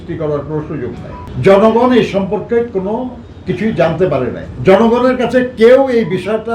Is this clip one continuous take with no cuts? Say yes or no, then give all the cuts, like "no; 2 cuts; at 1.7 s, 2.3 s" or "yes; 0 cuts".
no; 2 cuts; at 1.2 s, 4.5 s